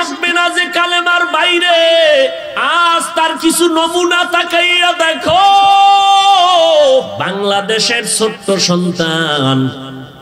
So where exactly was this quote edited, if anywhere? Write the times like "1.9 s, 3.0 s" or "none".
2.5 s, 7.1 s